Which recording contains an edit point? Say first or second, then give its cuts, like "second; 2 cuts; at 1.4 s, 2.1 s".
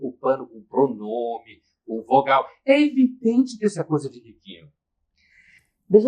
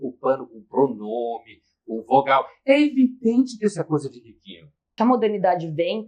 second; 1 cut; at 4.9 s